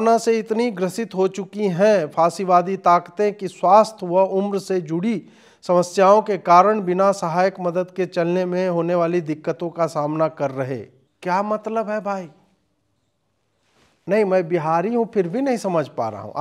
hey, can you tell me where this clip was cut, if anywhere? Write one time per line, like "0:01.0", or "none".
none

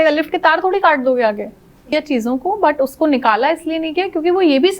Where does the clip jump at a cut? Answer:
0:01.9

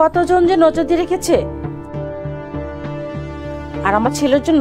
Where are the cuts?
none

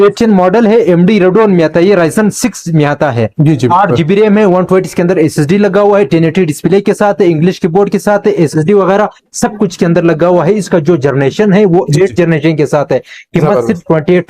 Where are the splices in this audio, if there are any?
none

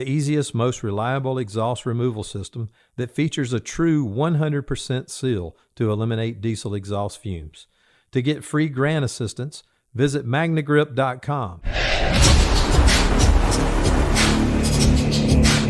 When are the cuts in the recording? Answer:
0:11.6

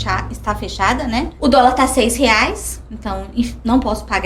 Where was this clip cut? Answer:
0:01.3

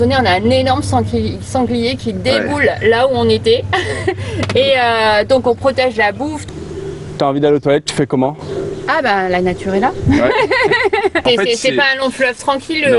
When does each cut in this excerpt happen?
0:06.5
0:11.2

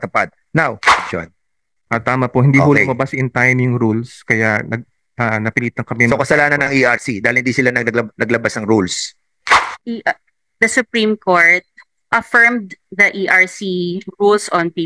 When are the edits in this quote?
0:00.9
0:09.6

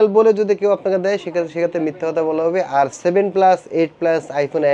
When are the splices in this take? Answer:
none

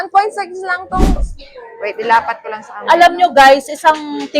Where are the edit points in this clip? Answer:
0:01.1

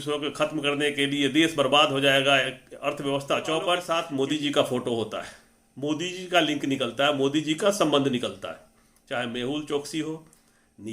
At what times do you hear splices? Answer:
0:04.0

